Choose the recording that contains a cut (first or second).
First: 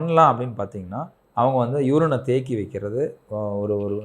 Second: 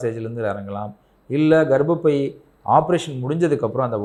first